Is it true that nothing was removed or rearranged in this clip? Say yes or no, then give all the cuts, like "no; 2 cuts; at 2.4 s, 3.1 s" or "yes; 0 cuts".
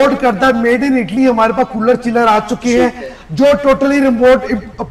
yes; 0 cuts